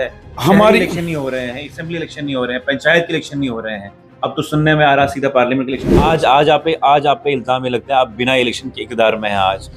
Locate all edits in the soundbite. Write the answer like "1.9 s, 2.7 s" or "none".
6.1 s